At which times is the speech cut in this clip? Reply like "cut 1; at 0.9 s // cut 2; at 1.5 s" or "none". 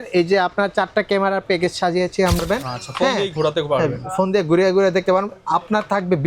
cut 1; at 2.4 s

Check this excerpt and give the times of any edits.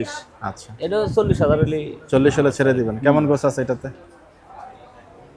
none

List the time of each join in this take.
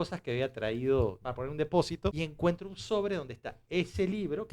cut 1; at 1.2 s // cut 2; at 2.2 s

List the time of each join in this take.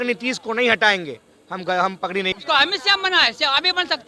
cut 1; at 2.4 s

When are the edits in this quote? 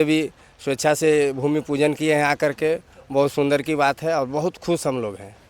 none

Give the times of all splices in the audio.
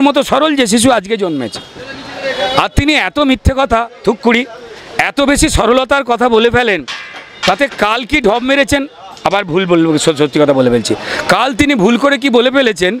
none

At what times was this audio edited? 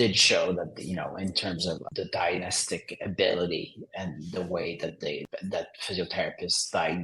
cut 1; at 1.8 s // cut 2; at 5.3 s

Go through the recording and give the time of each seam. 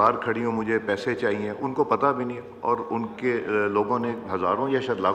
none

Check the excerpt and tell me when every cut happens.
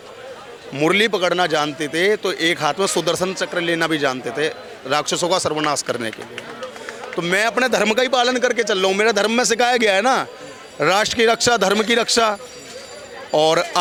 none

